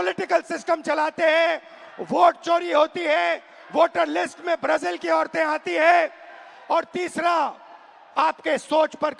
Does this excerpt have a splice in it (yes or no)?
no